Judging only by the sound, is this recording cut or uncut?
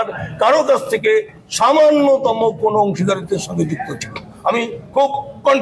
uncut